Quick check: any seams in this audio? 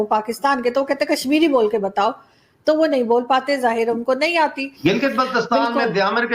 yes; 1 cut; at 4.7 s

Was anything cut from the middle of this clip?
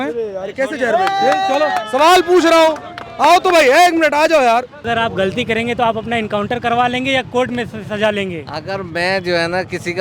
yes; 1 cut; at 4.8 s

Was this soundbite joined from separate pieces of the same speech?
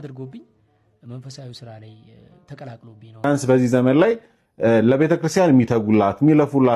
yes; 1 cut; at 3.2 s

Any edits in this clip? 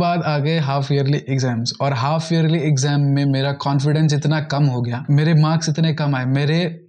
no; 0 cuts

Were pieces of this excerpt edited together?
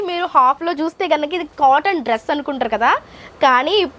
no; 0 cuts

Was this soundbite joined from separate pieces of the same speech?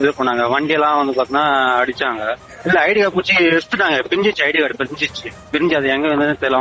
no; 0 cuts

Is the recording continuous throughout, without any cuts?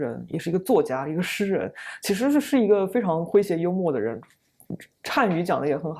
yes; 0 cuts

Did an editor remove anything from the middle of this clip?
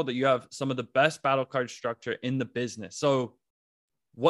no; 0 cuts

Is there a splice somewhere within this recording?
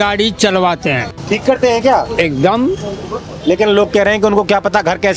yes; 1 cut; at 1.1 s

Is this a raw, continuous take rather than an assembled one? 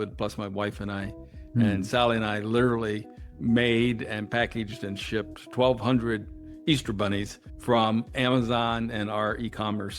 yes; 0 cuts

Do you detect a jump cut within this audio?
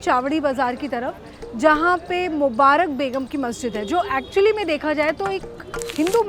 no; 0 cuts

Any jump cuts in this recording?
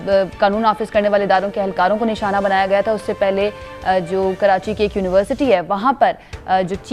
no; 0 cuts

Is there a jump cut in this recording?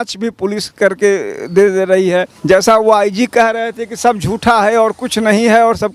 yes; 1 cut; at 2.3 s

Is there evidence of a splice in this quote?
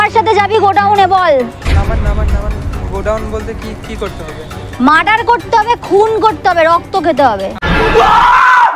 no; 0 cuts

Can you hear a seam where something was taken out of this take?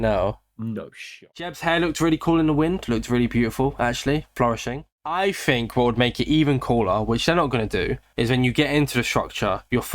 yes; 2 cuts; at 1.3 s, 5.0 s

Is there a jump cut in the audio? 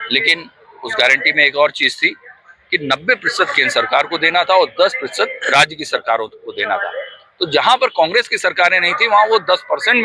no; 0 cuts

